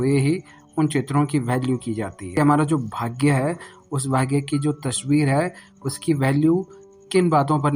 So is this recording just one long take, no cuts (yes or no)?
no